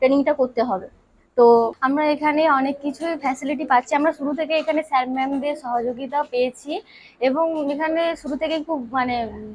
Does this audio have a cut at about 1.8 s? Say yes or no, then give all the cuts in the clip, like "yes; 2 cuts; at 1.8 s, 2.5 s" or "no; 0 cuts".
yes; 1 cut; at 1.8 s